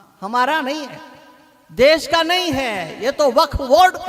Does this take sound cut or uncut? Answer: uncut